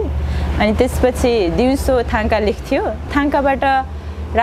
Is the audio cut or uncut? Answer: cut